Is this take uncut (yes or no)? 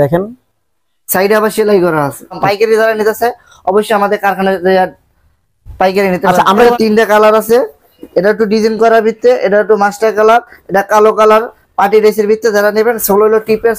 no